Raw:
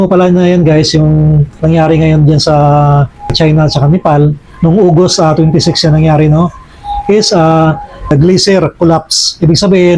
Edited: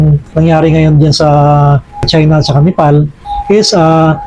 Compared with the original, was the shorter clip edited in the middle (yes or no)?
yes